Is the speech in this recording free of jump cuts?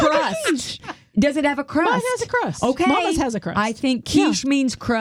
yes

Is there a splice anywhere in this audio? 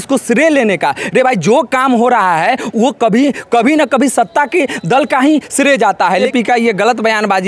yes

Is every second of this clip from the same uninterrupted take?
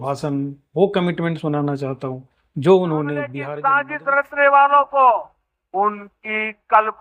no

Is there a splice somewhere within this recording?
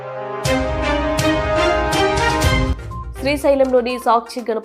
yes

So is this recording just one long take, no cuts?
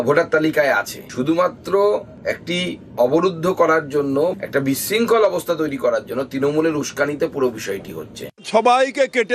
no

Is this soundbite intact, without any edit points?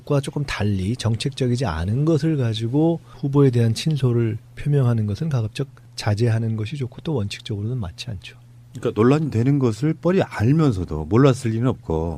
yes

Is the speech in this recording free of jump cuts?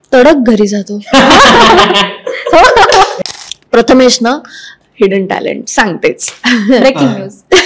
no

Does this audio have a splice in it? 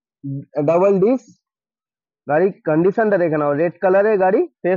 no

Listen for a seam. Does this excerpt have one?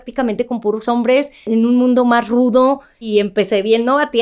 yes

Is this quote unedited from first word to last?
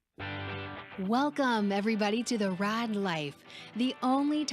no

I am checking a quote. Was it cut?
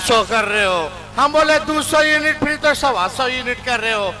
no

